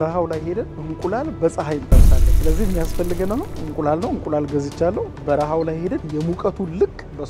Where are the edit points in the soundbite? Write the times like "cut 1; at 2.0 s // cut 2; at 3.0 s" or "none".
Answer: cut 1; at 5.2 s